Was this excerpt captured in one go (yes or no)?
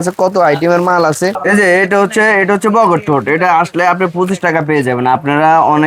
no